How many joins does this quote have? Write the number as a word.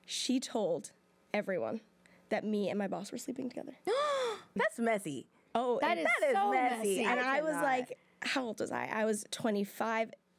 one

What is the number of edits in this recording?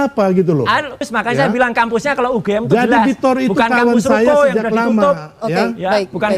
one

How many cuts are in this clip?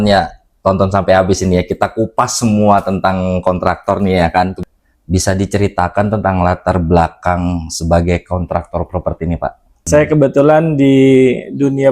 two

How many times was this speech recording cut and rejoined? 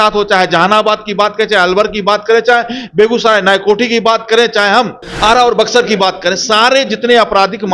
one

